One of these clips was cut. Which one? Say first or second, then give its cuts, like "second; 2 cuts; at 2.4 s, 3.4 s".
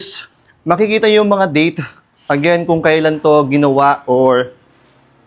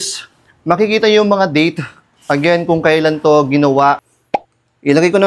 second; 1 cut; at 4.0 s